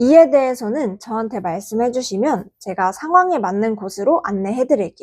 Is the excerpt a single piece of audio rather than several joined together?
yes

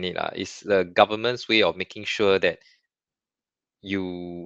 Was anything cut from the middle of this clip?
no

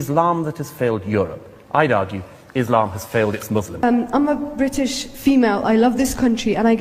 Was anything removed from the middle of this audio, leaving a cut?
yes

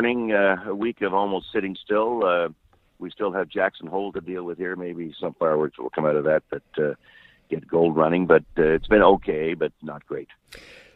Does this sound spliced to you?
no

